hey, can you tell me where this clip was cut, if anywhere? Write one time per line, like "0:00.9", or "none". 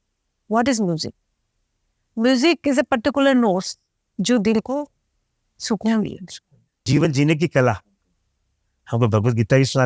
0:07.1